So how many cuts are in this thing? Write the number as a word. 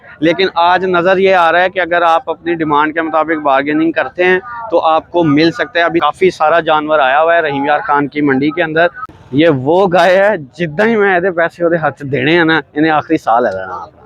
two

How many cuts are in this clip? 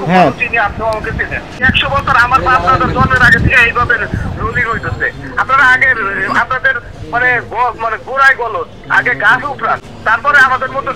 one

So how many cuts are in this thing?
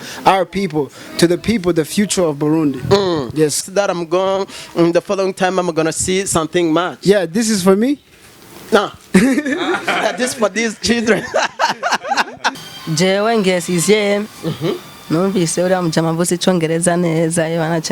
two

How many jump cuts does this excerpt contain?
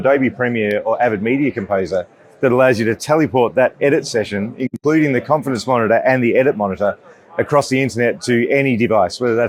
zero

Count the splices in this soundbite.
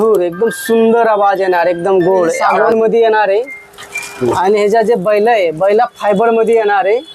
one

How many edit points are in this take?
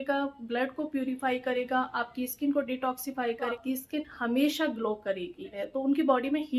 two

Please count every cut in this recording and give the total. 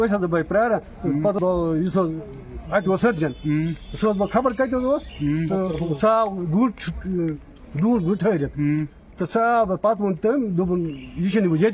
one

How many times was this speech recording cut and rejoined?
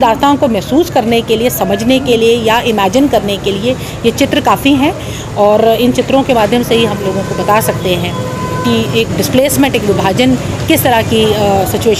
zero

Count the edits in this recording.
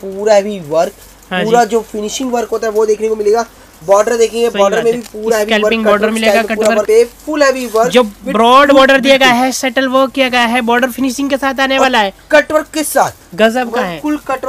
one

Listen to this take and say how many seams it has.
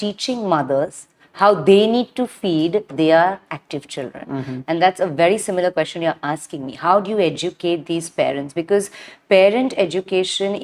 zero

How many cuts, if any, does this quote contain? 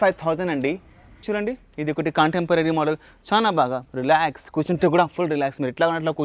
one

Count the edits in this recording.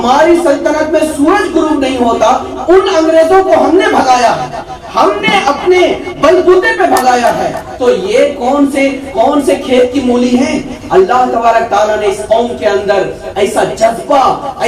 zero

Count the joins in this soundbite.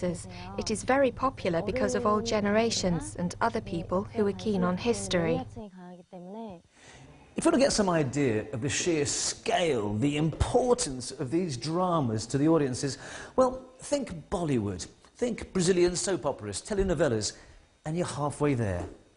one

